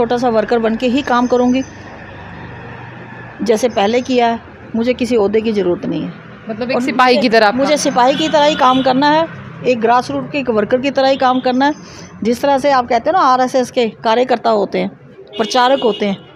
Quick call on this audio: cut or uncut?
uncut